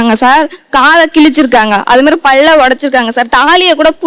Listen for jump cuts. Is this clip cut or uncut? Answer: uncut